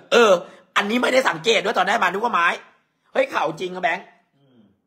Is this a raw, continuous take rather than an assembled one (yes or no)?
yes